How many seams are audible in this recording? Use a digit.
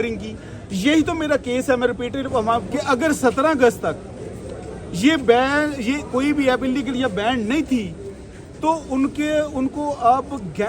1